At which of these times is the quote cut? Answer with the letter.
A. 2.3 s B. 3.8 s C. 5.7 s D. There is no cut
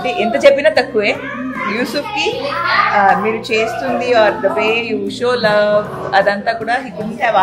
D